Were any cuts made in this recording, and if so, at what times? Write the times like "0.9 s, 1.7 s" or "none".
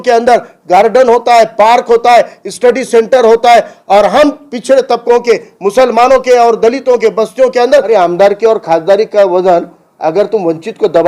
7.9 s

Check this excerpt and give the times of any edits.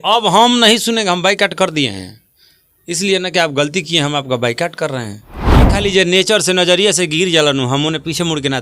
5.8 s

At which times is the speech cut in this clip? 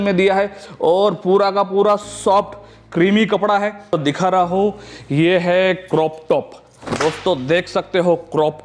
3.9 s

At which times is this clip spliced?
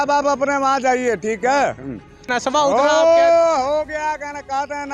2.2 s

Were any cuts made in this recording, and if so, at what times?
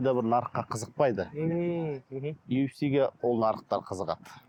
none

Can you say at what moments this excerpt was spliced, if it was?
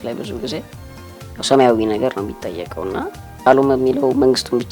3.5 s

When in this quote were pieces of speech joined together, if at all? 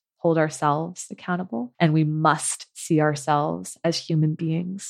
1.7 s

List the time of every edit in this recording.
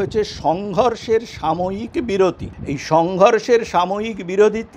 2.5 s

